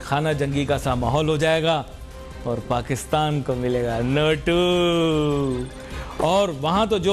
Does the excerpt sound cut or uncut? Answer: uncut